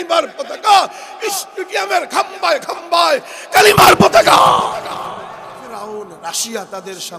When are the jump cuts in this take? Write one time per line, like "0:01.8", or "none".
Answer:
0:05.6